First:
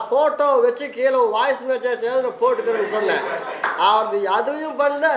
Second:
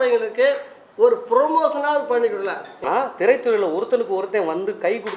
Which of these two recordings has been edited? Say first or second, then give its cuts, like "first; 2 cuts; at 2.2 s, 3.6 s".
second; 1 cut; at 2.8 s